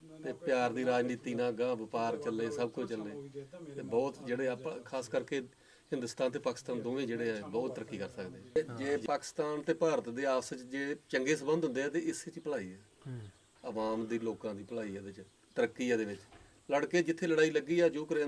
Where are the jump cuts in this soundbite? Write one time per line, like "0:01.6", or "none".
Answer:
0:08.5